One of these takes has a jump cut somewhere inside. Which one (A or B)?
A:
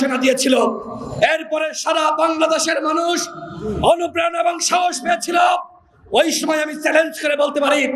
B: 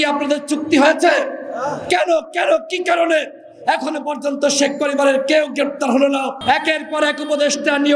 B